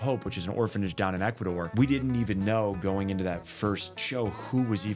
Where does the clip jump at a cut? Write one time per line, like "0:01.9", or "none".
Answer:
0:01.7
0:03.9

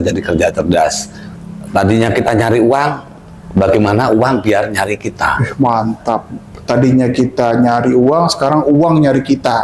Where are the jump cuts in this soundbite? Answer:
none

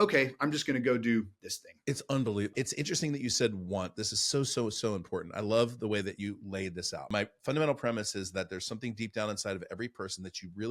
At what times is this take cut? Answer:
0:01.8
0:02.5
0:07.1

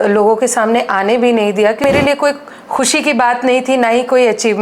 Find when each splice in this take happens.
0:01.8

